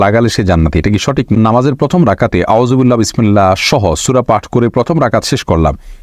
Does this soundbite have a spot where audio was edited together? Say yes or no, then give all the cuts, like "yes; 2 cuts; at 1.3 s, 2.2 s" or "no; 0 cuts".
yes; 1 cut; at 1.3 s